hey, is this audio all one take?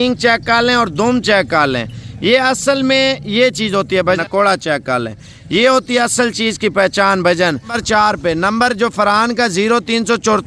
no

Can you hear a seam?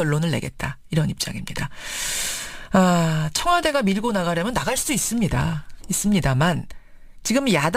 no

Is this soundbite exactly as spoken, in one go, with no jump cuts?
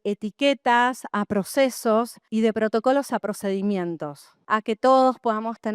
no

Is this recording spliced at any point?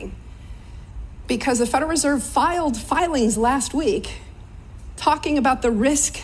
no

